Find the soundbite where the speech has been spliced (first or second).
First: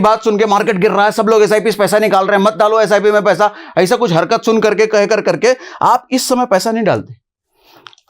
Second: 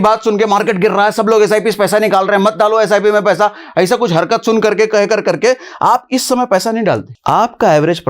second